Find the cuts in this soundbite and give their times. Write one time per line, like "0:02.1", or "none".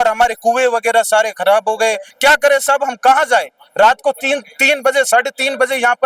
0:02.1

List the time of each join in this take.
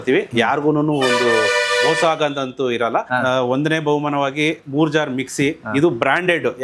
0:03.1

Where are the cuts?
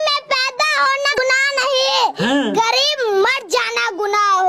0:01.2

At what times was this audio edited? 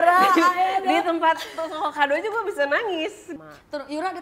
0:03.2

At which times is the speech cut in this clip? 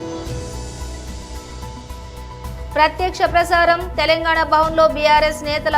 none

